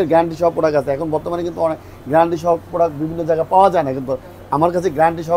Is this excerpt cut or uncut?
uncut